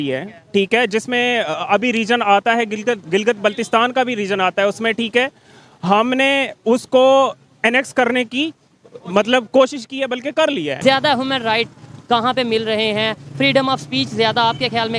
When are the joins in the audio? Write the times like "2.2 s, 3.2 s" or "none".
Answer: 10.7 s

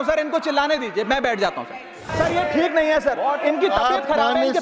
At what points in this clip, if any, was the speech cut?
2.1 s

